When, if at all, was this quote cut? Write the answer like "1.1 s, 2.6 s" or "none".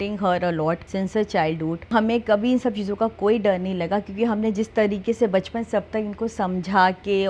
0.9 s, 1.9 s